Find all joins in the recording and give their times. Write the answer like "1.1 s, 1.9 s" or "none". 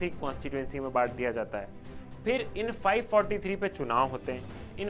none